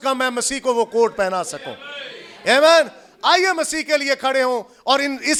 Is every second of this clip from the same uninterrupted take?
yes; 0 cuts

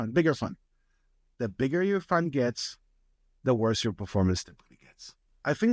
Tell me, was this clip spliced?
no; 0 cuts

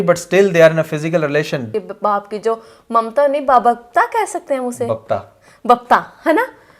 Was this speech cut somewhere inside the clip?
yes; 1 cut; at 1.7 s

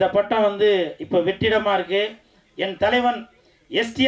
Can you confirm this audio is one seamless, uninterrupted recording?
yes; 0 cuts

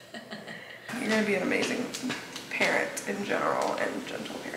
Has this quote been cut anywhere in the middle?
yes; 1 cut; at 0.9 s

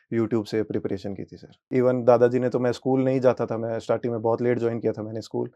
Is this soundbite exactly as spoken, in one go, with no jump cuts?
no; 1 cut; at 1.7 s

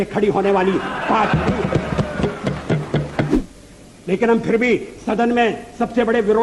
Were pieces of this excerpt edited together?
yes; 1 cut; at 3.3 s

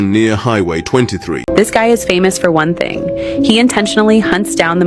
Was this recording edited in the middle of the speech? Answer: yes; 1 cut; at 1.4 s

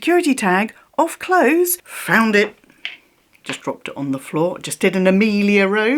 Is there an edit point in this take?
yes; 1 cut; at 1.9 s

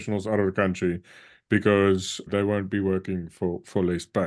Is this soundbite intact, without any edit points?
no; 1 cut; at 2.3 s

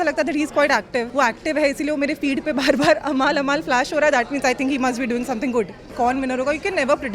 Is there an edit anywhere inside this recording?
yes; 2 cuts; at 1.1 s, 5.9 s

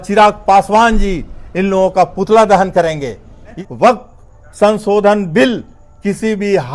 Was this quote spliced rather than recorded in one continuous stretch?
yes; 1 cut; at 3.6 s

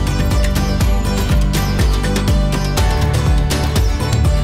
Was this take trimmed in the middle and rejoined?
no; 0 cuts

